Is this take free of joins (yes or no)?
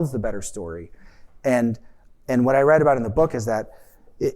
yes